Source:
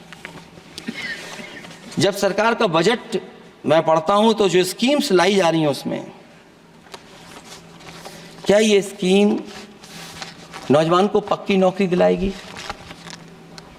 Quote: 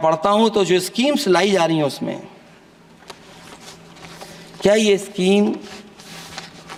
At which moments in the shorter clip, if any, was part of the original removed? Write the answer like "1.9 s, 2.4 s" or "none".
none